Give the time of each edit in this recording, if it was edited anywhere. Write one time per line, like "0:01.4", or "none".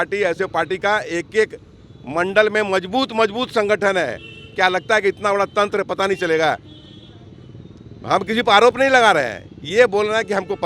none